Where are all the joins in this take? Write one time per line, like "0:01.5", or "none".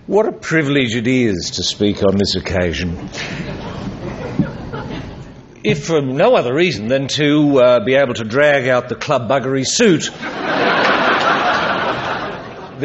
none